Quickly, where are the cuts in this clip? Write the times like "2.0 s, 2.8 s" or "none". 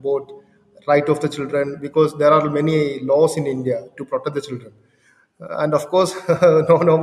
none